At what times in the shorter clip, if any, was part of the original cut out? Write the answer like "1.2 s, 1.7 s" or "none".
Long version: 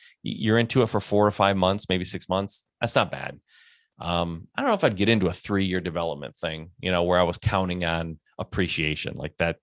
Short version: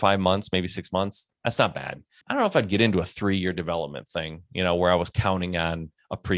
2.2 s